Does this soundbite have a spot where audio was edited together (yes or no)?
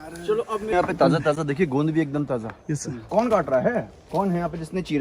yes